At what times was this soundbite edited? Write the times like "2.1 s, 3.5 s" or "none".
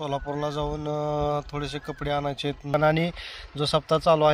2.7 s